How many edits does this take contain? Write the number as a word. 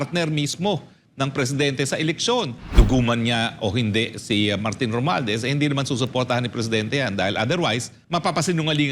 two